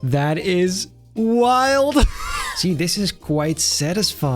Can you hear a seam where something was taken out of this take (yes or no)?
yes